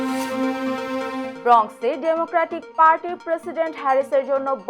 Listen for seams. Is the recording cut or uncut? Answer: uncut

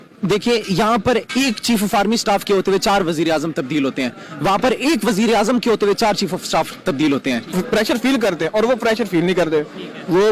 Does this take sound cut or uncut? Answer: cut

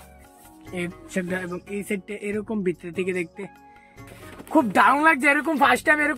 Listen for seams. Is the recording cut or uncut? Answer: cut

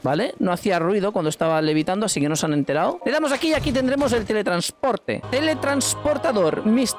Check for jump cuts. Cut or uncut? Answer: cut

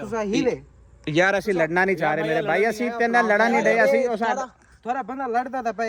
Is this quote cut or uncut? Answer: uncut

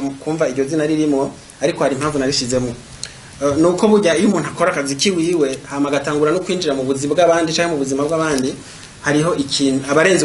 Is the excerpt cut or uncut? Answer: uncut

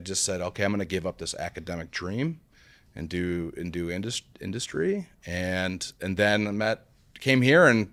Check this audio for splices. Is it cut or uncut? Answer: uncut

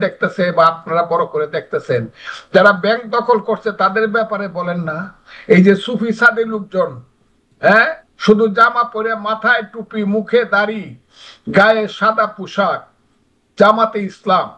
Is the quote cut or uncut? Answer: uncut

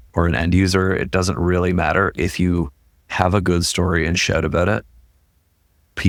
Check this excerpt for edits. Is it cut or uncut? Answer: uncut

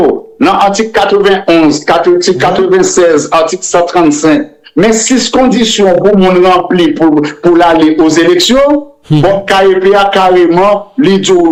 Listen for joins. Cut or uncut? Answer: uncut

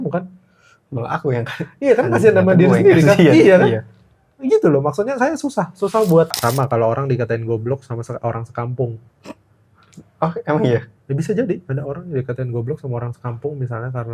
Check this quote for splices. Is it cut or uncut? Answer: cut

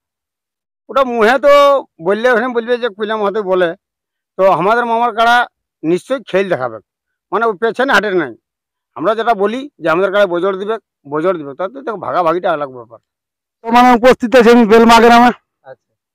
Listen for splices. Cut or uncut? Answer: cut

